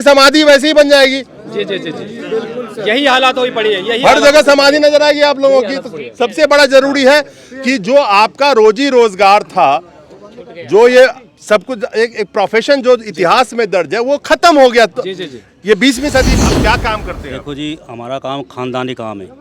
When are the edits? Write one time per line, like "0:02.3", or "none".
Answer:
0:16.3